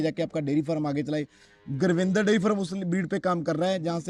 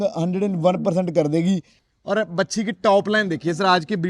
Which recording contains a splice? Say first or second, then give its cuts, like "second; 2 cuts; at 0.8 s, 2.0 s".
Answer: second; 1 cut; at 1.8 s